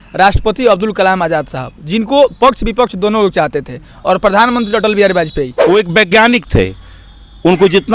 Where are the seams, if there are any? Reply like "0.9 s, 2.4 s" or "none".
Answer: 5.6 s